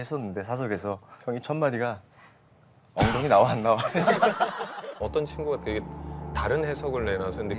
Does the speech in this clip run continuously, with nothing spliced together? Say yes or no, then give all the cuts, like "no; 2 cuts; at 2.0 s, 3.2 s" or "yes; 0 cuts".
no; 1 cut; at 4.8 s